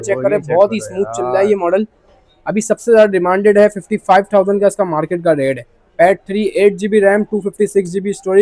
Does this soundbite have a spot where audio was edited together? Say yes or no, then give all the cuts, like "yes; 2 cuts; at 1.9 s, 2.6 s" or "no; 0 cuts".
no; 0 cuts